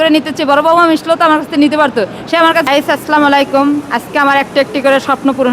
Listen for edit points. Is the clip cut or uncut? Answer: cut